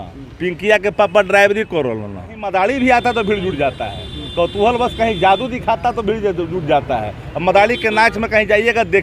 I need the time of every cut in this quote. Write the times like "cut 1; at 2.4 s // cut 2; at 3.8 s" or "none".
cut 1; at 2.4 s